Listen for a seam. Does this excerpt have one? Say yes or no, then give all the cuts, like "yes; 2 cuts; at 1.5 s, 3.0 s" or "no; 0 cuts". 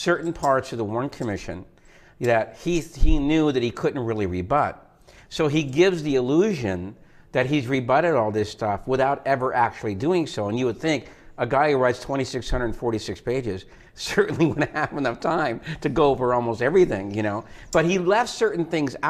no; 0 cuts